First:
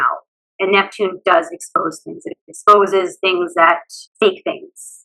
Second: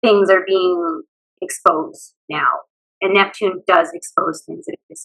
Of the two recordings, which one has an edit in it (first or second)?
first